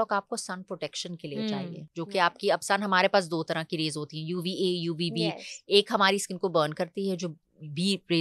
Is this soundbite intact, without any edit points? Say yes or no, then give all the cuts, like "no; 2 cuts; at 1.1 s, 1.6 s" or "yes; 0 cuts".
yes; 0 cuts